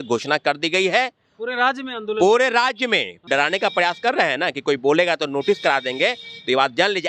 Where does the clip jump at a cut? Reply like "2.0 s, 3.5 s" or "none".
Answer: 3.2 s